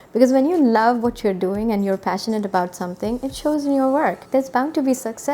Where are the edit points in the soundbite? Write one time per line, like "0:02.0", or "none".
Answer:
0:04.2